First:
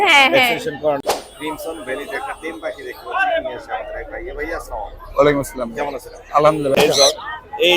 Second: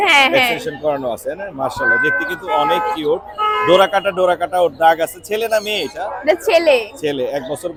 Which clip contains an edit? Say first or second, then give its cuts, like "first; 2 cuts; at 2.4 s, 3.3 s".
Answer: first; 2 cuts; at 1.0 s, 6.8 s